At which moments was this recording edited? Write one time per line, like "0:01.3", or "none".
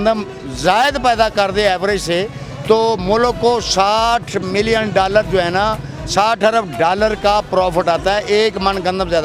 none